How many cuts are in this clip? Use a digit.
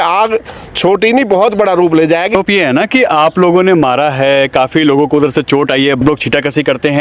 2